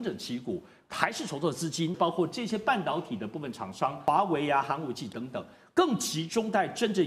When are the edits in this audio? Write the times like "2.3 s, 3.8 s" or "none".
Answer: 0.8 s, 2.0 s, 4.0 s